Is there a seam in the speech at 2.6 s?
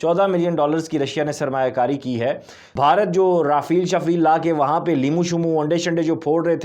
yes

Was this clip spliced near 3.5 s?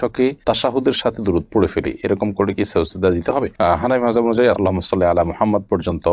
no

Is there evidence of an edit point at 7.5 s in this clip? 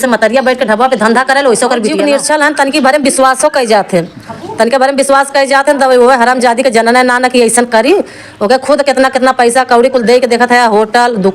no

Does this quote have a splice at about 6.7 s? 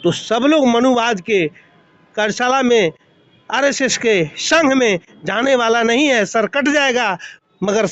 no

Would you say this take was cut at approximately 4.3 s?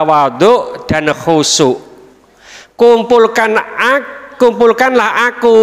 no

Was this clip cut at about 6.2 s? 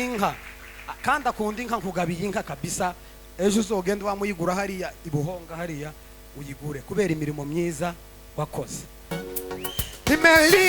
no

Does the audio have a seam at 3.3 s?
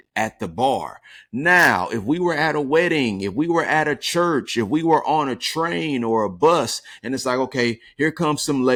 no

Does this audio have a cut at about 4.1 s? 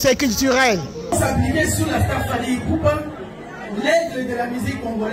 no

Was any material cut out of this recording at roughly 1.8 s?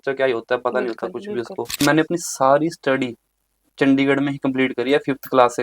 yes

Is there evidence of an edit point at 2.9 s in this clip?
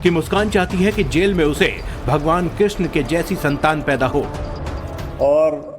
yes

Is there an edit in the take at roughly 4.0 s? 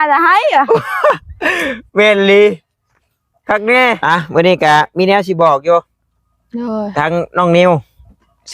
yes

